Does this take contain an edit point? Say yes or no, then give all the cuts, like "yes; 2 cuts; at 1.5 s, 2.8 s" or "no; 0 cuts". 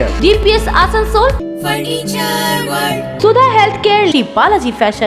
yes; 2 cuts; at 1.4 s, 3.2 s